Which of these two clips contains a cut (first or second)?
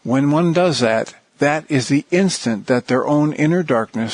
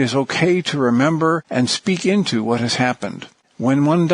second